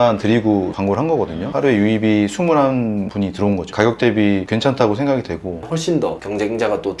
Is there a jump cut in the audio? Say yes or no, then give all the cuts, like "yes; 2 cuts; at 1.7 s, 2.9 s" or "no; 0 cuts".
yes; 2 cuts; at 1.5 s, 5.6 s